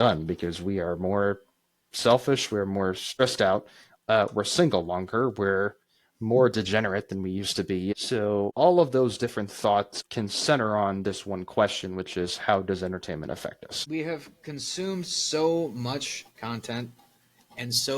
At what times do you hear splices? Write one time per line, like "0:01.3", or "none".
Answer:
0:03.1
0:07.9
0:10.0
0:13.7